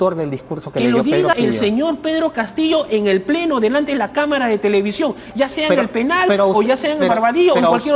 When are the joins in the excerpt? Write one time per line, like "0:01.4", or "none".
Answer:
0:01.3